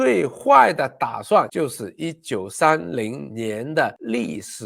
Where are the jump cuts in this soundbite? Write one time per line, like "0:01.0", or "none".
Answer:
none